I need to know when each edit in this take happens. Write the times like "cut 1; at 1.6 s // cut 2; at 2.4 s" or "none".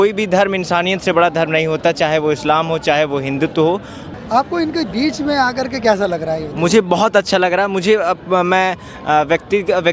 cut 1; at 4.0 s